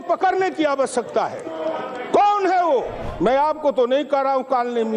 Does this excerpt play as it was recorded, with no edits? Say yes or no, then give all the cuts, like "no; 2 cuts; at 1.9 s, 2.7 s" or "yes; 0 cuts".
no; 1 cut; at 3.0 s